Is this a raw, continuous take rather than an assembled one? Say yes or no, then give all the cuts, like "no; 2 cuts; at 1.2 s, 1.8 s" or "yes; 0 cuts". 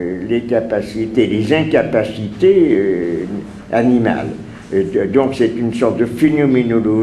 yes; 0 cuts